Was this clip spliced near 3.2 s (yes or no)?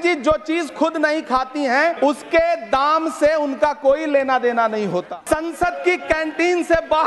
no